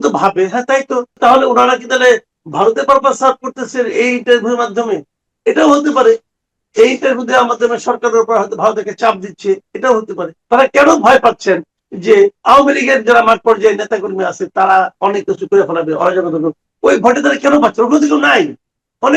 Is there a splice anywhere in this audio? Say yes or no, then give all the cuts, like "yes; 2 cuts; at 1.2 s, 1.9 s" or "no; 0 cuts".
yes; 2 cuts; at 1.1 s, 10.3 s